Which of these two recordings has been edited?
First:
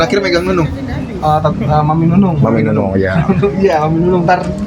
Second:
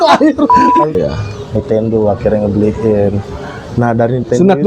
second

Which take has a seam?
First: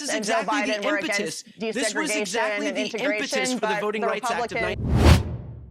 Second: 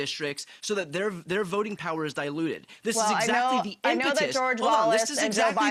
first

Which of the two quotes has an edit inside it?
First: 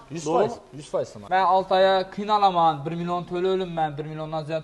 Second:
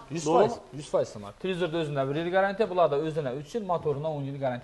first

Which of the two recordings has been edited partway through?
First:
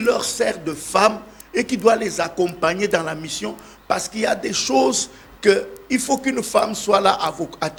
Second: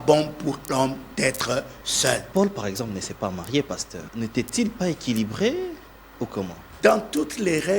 second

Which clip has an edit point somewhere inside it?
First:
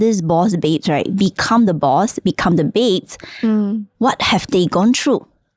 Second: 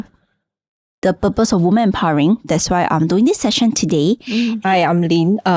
second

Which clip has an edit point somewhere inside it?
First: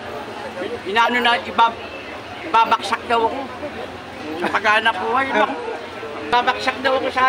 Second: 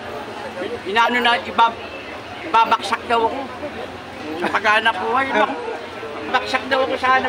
second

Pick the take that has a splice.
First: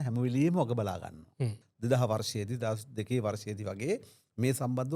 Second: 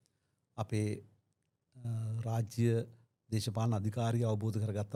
first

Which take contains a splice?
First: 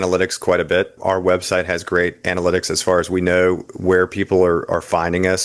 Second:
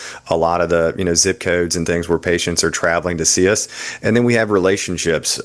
first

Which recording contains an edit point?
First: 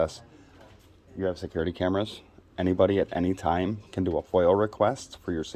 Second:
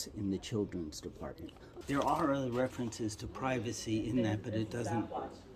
second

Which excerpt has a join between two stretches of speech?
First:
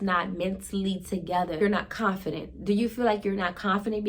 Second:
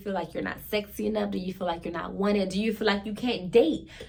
first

